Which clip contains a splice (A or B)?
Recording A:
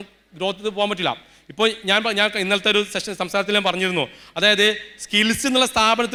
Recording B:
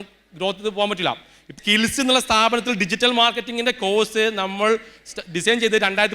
B